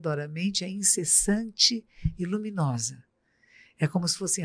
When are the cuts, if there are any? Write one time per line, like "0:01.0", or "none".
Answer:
none